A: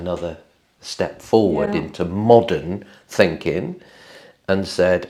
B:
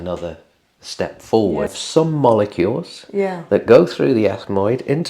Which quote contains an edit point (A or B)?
B